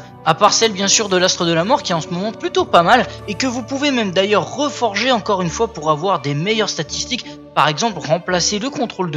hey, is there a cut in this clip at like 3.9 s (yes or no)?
no